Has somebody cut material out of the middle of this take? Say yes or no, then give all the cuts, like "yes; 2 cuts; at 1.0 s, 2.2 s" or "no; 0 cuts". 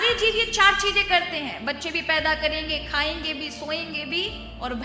no; 0 cuts